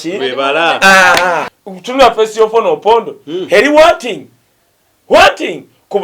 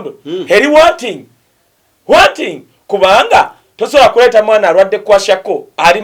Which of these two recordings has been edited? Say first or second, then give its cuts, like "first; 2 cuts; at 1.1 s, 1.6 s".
first; 1 cut; at 1.5 s